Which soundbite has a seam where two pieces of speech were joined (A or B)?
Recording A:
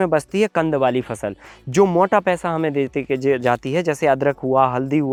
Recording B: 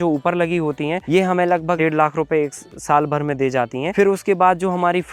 B